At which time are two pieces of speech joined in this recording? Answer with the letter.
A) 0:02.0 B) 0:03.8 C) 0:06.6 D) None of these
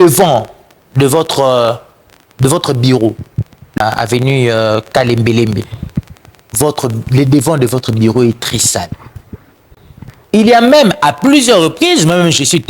B